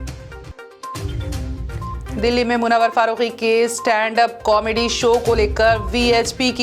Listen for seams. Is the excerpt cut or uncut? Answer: cut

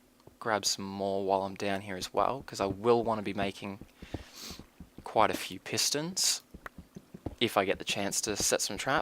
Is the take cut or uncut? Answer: cut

